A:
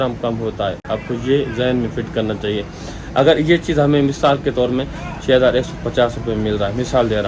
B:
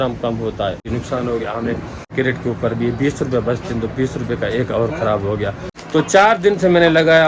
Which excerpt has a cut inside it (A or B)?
B